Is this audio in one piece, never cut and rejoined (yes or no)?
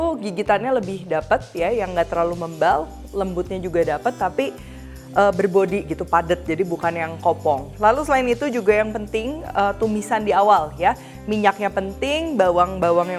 yes